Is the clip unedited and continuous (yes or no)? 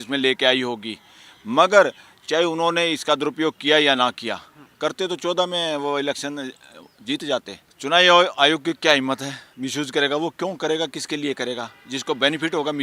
no